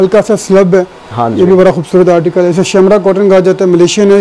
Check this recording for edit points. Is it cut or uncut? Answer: uncut